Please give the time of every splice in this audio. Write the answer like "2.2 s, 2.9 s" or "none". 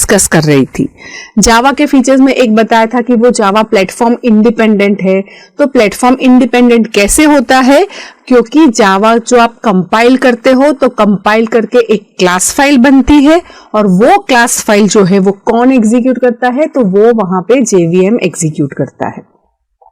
2.0 s